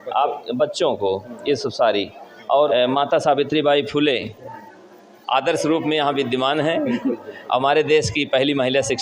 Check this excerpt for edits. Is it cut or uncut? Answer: cut